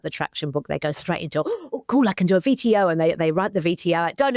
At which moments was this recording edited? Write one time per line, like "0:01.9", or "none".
none